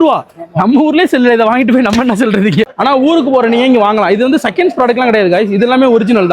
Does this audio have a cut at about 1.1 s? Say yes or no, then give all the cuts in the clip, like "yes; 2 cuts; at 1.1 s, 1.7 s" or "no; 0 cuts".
no; 1 cut; at 2.7 s